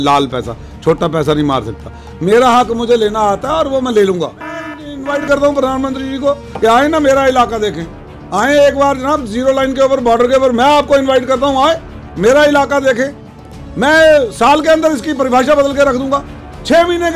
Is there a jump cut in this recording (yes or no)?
yes